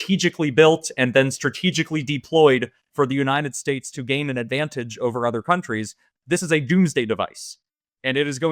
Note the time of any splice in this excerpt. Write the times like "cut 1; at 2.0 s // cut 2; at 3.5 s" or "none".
none